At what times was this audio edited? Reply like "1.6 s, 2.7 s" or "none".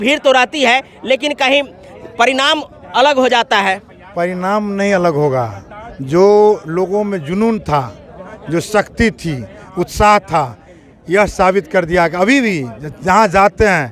none